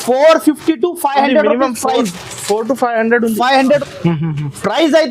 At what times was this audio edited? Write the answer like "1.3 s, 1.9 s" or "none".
3.8 s

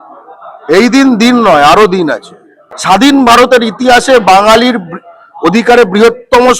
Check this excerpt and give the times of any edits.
2.7 s

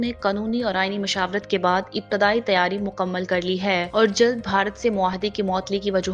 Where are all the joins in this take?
none

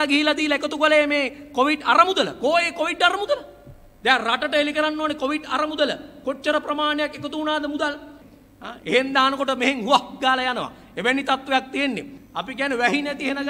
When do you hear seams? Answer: 8.1 s, 12.1 s

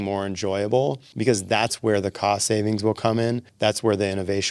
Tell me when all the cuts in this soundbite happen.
1.1 s, 3.5 s

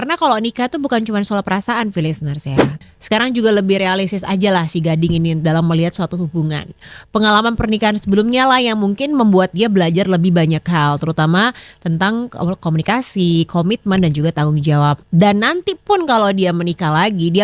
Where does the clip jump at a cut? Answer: 2.7 s

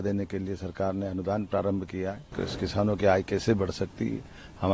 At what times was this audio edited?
2.4 s

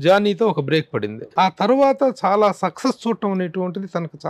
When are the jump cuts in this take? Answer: 1.2 s

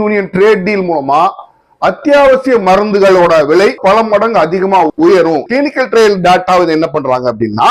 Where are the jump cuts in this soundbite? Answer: 5.4 s

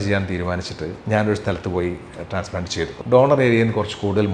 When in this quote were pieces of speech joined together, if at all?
1.0 s, 2.9 s

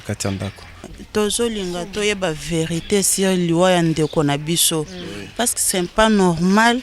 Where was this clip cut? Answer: 1.0 s

